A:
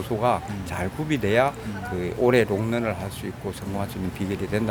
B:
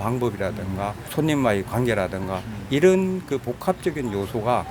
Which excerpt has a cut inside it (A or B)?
B